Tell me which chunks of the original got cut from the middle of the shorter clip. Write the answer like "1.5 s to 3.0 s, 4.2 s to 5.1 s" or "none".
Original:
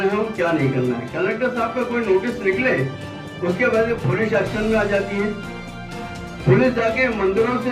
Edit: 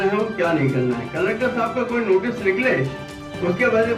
none